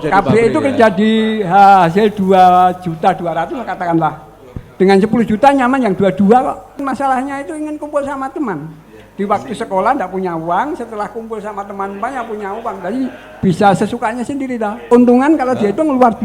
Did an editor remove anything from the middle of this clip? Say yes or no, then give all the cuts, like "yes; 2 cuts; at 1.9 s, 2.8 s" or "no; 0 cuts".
yes; 2 cuts; at 6.8 s, 14.9 s